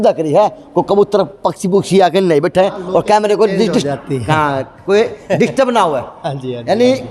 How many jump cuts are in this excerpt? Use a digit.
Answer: 0